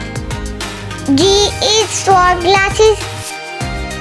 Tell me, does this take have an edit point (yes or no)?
yes